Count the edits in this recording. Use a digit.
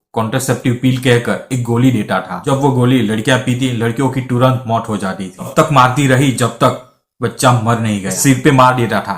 3